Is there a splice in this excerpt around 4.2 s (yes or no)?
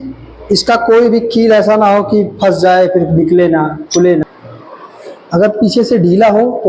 yes